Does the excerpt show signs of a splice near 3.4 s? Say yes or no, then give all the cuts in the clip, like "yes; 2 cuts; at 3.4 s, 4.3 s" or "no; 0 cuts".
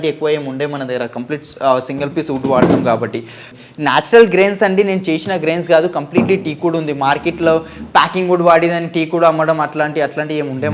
yes; 1 cut; at 3.4 s